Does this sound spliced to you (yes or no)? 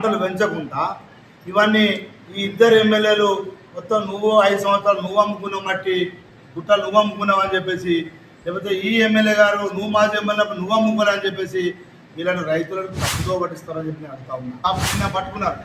yes